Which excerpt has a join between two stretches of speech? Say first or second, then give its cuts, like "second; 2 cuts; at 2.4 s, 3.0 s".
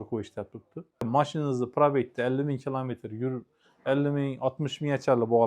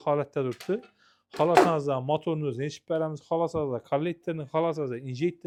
first; 1 cut; at 1.1 s